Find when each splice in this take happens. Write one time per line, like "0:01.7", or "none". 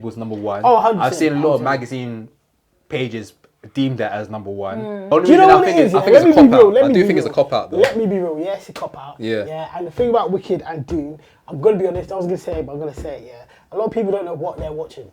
0:05.1